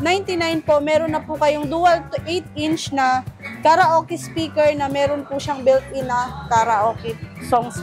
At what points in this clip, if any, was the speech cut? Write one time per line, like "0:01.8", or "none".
none

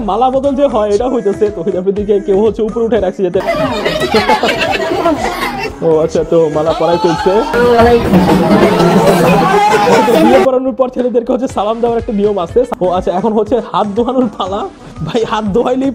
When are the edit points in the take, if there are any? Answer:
0:03.4
0:07.5
0:12.7

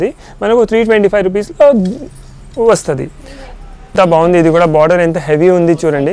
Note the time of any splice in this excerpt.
0:03.9

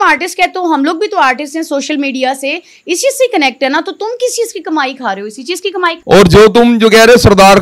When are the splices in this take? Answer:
none

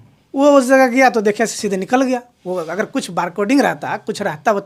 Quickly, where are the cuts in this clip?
none

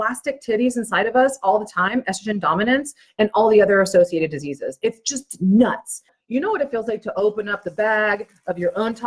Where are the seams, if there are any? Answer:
0:06.1

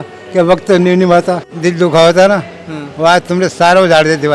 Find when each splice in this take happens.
0:01.4

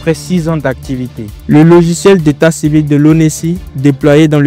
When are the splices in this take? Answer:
0:01.3

